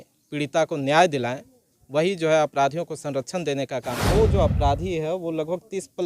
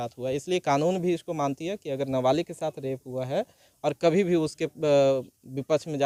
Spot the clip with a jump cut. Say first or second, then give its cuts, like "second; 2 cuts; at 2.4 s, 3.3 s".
first; 1 cut; at 4.0 s